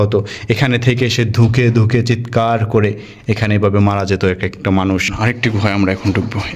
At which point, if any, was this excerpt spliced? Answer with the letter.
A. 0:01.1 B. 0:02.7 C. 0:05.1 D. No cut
C